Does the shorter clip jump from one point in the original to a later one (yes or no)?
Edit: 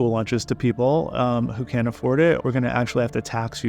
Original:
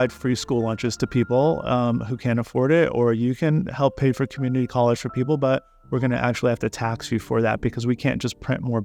yes